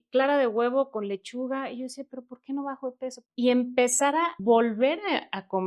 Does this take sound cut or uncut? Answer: cut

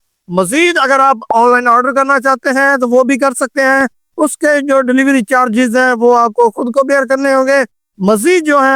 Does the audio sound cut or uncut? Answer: uncut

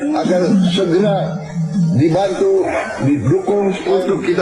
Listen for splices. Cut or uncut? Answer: uncut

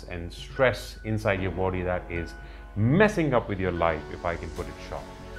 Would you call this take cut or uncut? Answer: uncut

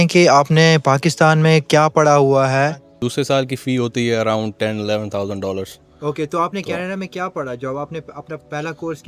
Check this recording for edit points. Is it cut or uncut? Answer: cut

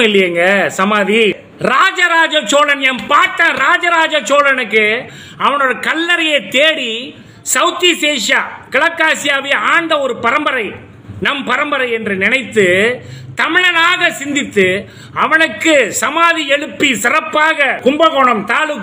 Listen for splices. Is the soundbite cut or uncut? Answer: cut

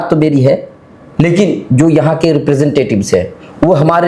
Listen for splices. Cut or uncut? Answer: uncut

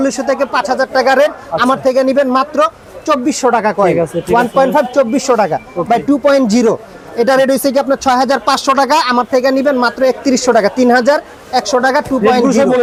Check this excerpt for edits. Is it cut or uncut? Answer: uncut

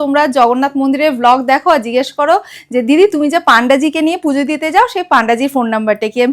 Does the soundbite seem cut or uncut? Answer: uncut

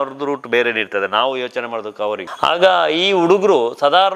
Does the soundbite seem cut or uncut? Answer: cut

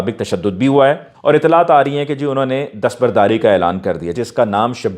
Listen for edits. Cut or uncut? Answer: cut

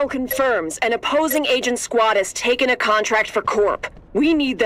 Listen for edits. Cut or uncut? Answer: uncut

